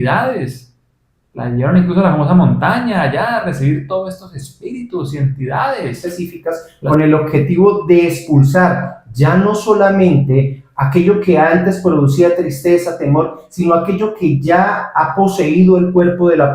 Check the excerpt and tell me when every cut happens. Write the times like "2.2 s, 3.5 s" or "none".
6.0 s